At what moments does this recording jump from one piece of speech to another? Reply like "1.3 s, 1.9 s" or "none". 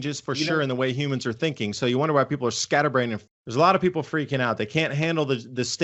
3.2 s